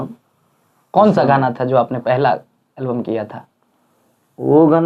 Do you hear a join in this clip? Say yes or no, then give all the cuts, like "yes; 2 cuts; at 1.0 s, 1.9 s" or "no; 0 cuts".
no; 0 cuts